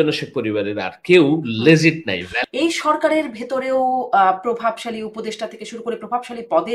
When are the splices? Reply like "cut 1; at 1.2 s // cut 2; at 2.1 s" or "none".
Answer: cut 1; at 2.3 s